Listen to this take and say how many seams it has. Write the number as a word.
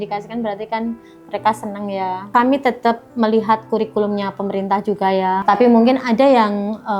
one